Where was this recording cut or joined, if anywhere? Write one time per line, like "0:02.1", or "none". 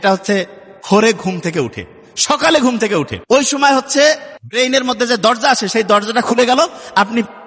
0:03.2
0:04.4